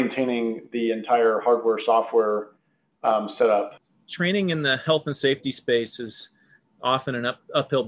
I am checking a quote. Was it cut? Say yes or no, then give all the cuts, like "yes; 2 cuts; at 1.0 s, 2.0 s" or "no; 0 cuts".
yes; 1 cut; at 3.8 s